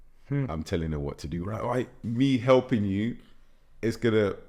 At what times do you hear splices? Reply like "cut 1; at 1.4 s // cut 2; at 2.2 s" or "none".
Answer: cut 1; at 2.0 s